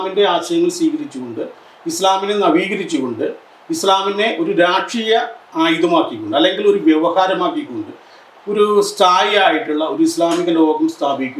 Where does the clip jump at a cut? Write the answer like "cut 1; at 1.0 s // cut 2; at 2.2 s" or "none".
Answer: none